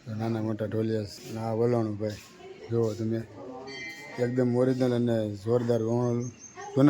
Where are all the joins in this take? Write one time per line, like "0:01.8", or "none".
0:01.2